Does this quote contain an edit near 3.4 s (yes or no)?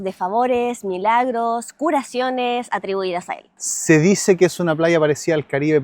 yes